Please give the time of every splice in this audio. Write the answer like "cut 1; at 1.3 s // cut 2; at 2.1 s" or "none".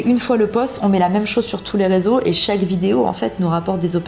none

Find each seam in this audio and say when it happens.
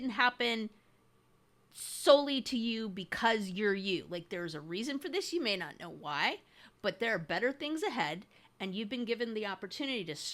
none

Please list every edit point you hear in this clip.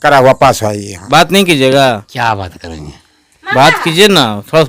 cut 1; at 0.9 s

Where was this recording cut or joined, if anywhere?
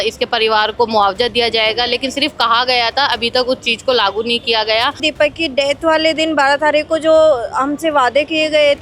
cut 1; at 5.1 s

